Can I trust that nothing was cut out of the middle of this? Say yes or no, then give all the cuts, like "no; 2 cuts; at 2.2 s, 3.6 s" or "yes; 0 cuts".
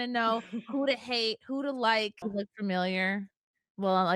no; 1 cut; at 2.2 s